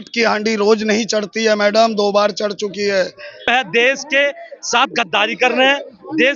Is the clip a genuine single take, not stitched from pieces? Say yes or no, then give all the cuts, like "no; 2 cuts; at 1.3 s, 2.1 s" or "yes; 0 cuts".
no; 1 cut; at 3.5 s